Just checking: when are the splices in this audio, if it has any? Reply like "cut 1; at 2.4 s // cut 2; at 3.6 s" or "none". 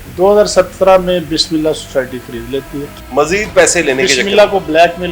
cut 1; at 2.9 s